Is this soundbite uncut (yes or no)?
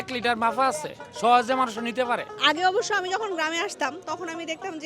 no